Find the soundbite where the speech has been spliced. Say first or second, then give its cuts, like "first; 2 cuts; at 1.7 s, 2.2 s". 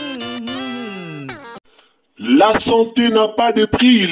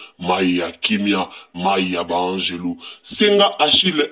first; 1 cut; at 1.5 s